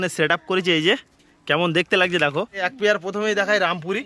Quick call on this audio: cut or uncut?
cut